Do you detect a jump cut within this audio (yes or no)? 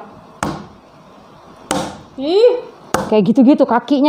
no